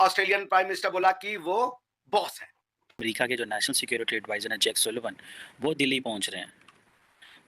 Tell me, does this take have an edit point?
yes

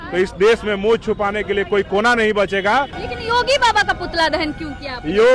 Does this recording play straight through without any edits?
no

